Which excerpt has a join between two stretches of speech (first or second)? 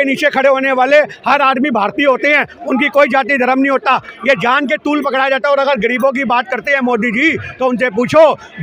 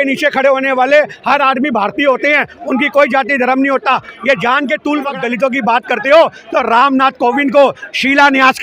second